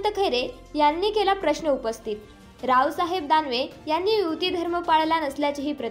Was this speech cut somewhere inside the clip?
no; 0 cuts

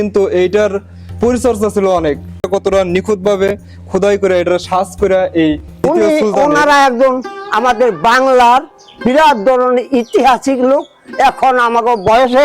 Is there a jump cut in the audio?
yes; 2 cuts; at 2.5 s, 5.7 s

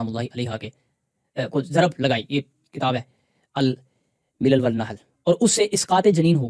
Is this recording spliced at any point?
no; 0 cuts

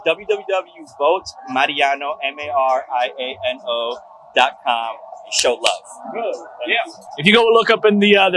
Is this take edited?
no; 0 cuts

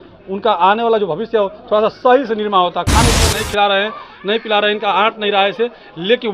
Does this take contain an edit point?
yes; 1 cut; at 3.3 s

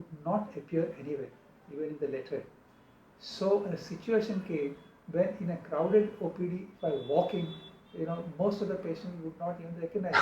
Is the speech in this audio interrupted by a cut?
no; 0 cuts

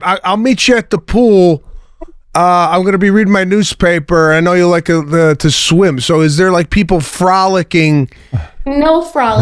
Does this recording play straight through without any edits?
yes; 0 cuts

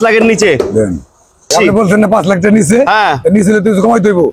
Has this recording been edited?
yes; 1 cut; at 1.5 s

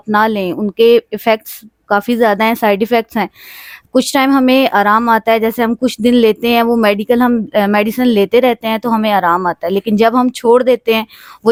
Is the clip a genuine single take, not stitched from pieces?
yes; 0 cuts

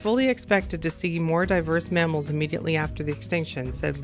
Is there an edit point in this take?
no; 0 cuts

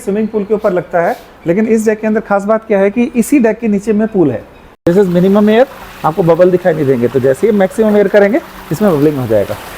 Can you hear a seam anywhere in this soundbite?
yes; 1 cut; at 4.8 s

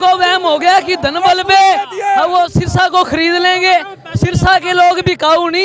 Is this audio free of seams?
yes; 0 cuts

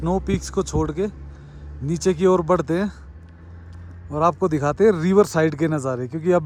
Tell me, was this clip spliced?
no; 0 cuts

